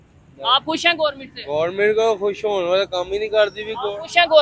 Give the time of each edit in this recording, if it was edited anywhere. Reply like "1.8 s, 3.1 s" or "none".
none